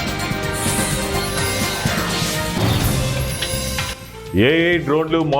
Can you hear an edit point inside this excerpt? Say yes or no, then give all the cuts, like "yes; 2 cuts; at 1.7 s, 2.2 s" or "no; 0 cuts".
yes; 1 cut; at 4.0 s